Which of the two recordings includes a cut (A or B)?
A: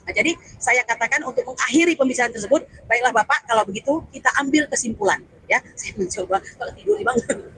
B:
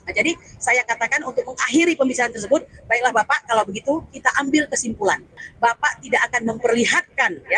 B